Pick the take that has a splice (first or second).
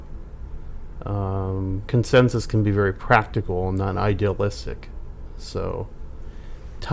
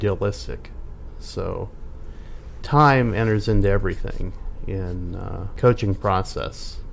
second